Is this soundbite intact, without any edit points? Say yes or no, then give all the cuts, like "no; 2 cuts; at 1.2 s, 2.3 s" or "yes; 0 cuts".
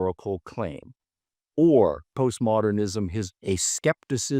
no; 2 cuts; at 2.1 s, 3.3 s